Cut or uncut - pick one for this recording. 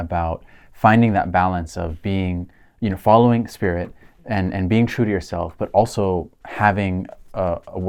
uncut